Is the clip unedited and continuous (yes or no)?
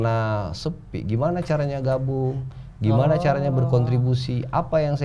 yes